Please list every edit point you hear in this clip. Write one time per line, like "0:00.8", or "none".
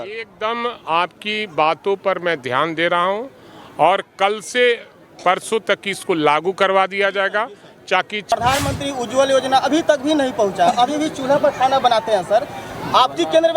0:08.3